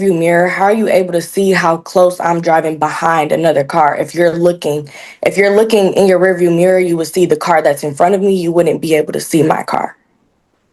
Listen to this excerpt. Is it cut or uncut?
uncut